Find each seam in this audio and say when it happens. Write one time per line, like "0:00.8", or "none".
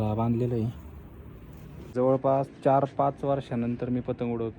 0:01.9